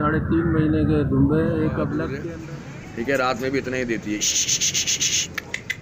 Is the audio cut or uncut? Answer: cut